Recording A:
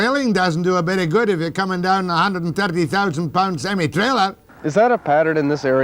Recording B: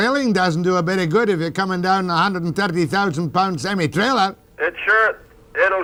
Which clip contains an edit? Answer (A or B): A